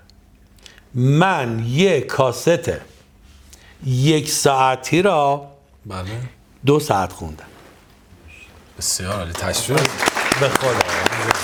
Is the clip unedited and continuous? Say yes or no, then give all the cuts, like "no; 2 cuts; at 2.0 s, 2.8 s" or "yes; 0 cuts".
yes; 0 cuts